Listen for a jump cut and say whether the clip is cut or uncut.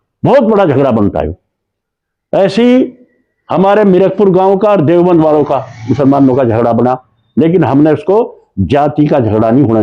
uncut